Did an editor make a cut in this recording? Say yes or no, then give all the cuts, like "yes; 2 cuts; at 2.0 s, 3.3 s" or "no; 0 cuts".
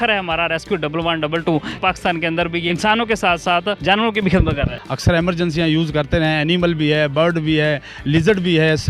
yes; 4 cuts; at 1.7 s, 2.7 s, 3.8 s, 4.8 s